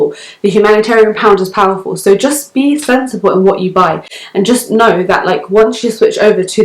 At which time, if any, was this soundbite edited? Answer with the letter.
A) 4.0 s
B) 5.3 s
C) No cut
C